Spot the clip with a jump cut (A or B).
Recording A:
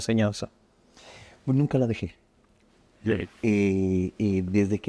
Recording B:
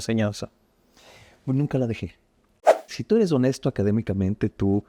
B